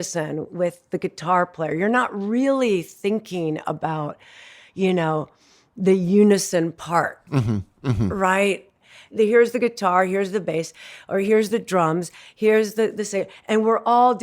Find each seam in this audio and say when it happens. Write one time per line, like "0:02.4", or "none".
0:09.1

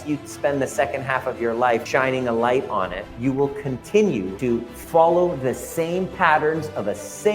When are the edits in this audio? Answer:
0:01.8
0:03.0
0:04.7

